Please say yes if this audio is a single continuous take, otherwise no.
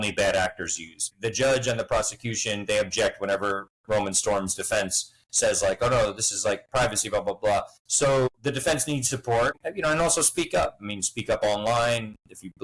no